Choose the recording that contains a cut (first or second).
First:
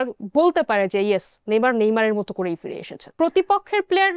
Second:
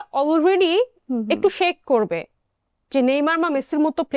first